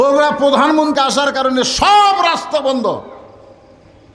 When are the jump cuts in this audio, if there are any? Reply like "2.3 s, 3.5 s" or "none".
0.9 s